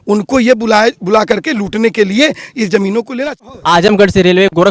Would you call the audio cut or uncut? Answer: cut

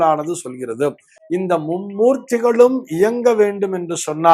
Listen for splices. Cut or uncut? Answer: uncut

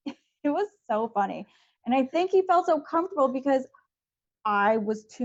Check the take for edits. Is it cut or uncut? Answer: uncut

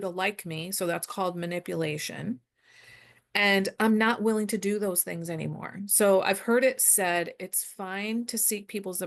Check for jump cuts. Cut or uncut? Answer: uncut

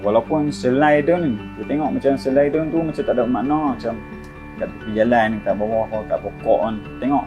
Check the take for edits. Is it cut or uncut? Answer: uncut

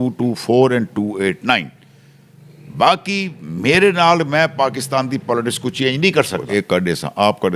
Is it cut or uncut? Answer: cut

